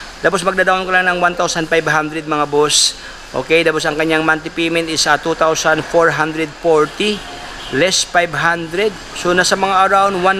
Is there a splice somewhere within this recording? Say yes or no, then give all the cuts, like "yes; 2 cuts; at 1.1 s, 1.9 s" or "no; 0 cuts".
no; 0 cuts